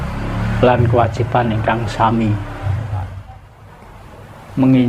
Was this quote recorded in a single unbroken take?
no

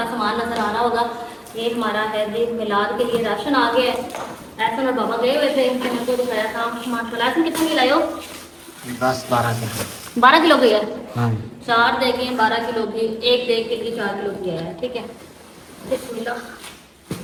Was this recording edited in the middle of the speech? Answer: no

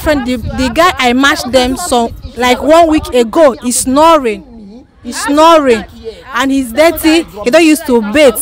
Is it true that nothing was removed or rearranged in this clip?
yes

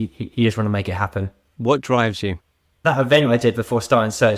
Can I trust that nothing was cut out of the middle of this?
no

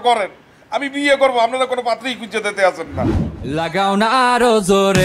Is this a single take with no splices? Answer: no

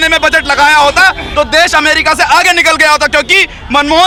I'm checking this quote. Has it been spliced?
no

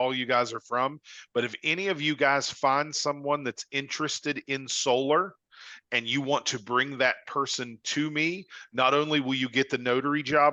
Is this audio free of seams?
yes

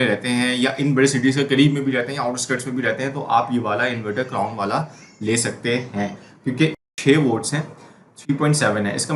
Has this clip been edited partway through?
yes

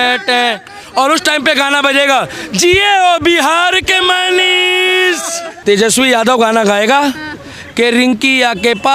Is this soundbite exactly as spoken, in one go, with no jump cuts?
yes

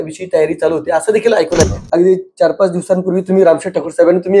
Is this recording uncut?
no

